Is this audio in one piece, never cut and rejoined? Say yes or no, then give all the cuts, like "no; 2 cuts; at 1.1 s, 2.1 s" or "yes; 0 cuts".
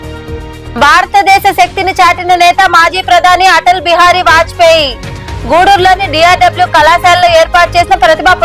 yes; 0 cuts